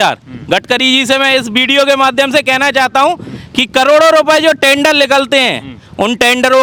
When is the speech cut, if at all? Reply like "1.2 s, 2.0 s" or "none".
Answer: none